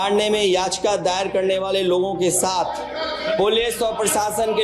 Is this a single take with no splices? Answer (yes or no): yes